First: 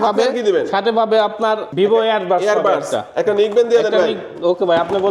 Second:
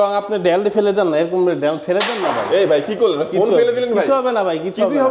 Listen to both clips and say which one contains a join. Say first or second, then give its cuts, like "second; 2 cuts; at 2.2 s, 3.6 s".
first; 1 cut; at 1.7 s